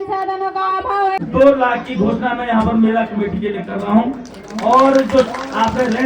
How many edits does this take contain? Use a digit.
1